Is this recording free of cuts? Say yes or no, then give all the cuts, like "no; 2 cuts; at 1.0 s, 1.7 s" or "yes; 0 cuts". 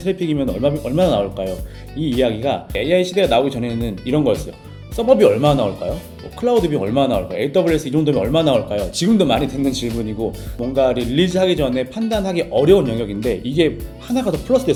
yes; 0 cuts